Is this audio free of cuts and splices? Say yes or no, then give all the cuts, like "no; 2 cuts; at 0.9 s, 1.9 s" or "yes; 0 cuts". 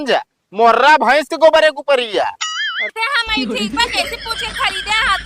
no; 1 cut; at 2.9 s